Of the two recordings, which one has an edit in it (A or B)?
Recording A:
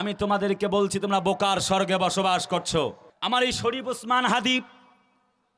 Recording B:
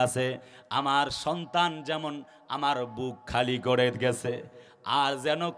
A